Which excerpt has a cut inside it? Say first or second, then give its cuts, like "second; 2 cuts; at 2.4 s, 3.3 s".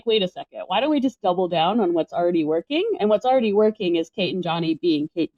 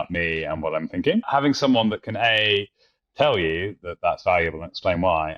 second; 1 cut; at 1.3 s